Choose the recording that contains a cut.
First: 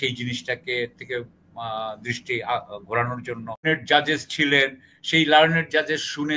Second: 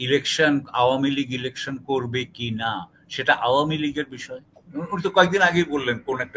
first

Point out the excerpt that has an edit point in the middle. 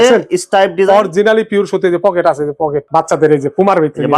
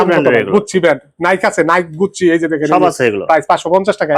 first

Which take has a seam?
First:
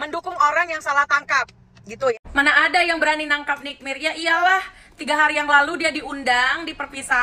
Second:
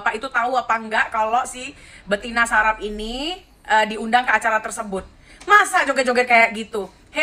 first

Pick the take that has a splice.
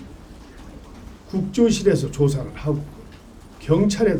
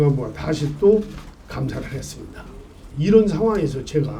second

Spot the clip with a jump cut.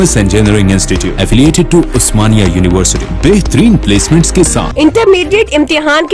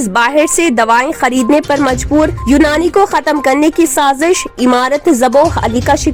first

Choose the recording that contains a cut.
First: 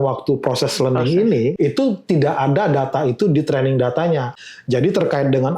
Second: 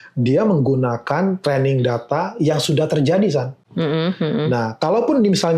first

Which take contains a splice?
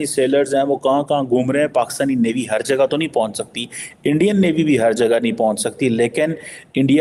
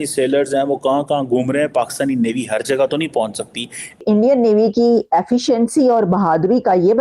second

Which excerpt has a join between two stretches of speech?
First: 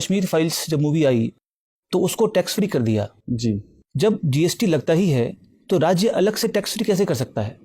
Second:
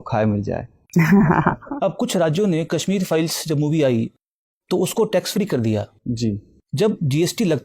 second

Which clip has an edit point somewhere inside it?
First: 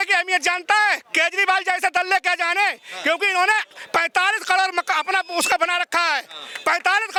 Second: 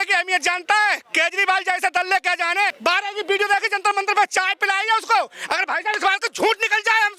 second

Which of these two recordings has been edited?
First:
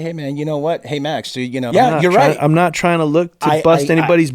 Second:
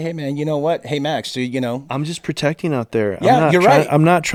first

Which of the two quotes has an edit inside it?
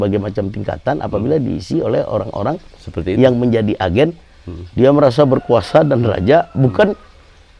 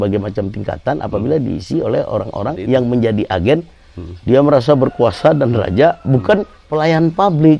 second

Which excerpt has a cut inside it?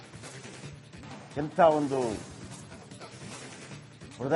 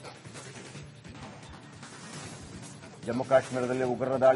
second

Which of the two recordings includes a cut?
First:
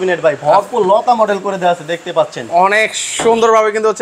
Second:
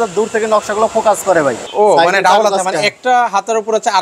second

